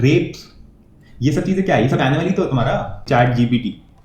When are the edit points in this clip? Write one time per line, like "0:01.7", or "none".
0:03.0